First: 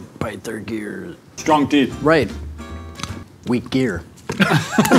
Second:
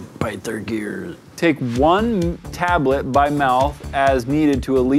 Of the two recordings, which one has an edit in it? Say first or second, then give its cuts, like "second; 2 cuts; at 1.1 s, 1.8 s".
second; 1 cut; at 1.2 s